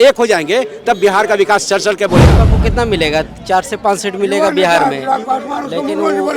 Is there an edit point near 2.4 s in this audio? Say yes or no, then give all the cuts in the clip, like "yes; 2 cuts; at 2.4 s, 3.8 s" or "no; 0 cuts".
yes; 1 cut; at 2.4 s